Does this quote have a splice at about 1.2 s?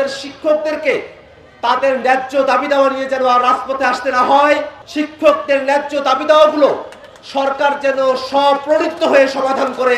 no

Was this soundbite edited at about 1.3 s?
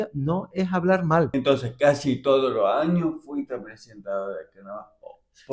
yes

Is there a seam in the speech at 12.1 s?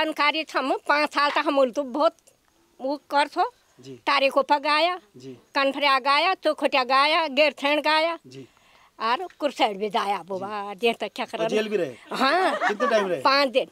no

